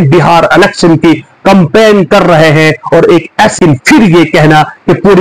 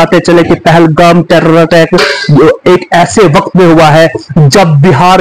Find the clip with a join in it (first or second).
first